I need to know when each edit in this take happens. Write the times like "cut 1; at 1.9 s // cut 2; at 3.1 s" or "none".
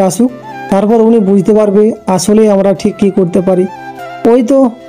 none